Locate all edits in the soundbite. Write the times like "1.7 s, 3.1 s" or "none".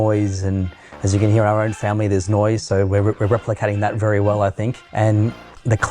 4.8 s

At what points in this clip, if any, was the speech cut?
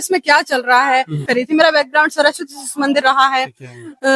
1.2 s

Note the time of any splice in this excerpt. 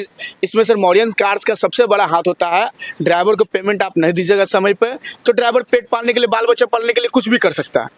none

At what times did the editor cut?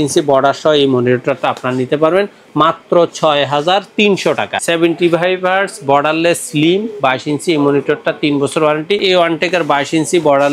4.5 s, 9.0 s

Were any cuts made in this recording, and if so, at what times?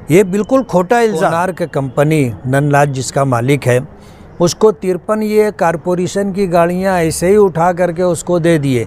1.5 s

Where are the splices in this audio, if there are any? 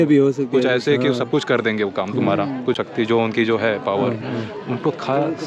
2.8 s

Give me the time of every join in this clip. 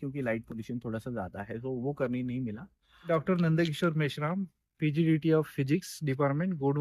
2.9 s

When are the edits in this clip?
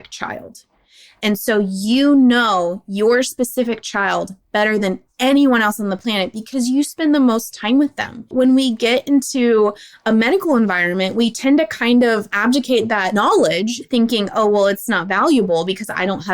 8.3 s, 13.2 s

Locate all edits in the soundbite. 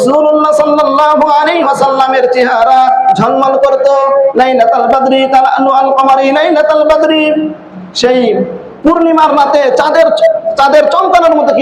4.3 s, 8.6 s, 10.5 s

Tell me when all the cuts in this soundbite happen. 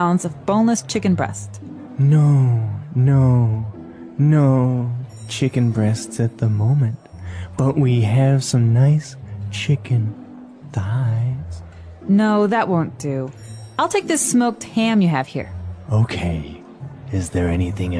none

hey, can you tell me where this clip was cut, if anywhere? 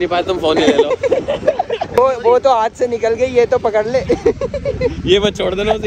1.9 s

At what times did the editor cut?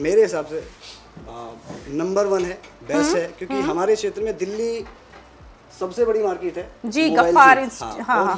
none

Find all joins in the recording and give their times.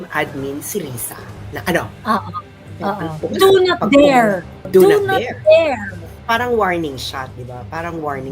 3.2 s, 4.6 s, 6.1 s

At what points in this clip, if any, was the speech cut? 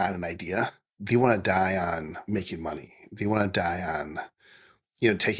0.9 s, 2.2 s

